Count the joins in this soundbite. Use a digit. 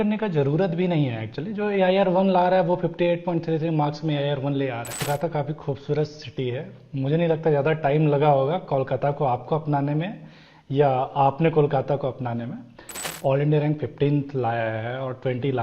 2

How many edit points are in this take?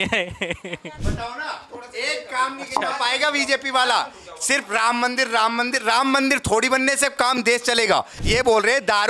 2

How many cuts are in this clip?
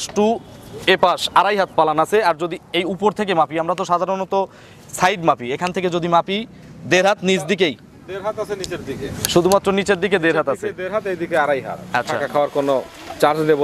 1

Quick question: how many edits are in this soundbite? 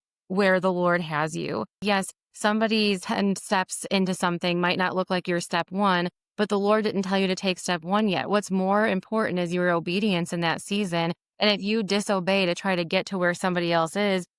2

